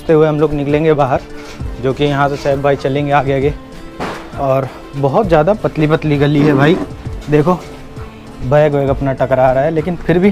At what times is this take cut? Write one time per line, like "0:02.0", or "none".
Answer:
none